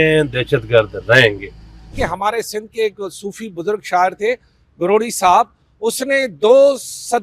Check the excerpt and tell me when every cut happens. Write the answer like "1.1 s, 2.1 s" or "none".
1.9 s